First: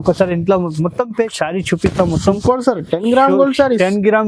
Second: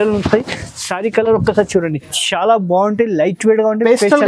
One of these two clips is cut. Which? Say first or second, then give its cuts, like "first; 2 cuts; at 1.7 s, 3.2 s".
first; 1 cut; at 1.3 s